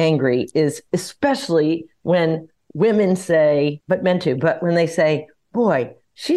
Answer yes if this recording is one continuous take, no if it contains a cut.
yes